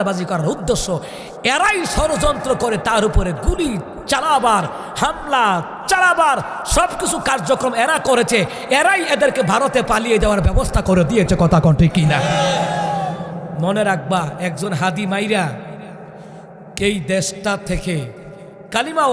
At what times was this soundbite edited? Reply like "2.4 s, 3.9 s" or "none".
none